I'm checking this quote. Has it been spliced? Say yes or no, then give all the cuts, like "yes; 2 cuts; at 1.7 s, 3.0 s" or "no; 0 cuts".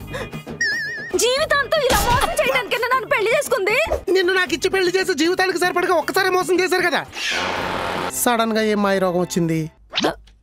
yes; 1 cut; at 8.1 s